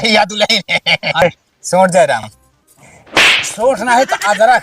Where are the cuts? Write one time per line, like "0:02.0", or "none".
0:01.2